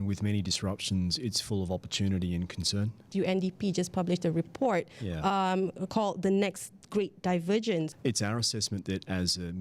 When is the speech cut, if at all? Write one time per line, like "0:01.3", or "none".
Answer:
0:03.1
0:07.9